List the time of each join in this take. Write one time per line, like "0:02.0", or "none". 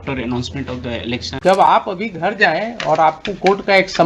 0:01.4